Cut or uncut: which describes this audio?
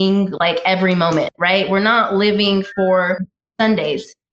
uncut